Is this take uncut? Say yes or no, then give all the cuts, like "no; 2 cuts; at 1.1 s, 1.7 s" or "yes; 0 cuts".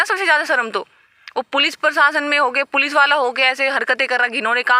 yes; 0 cuts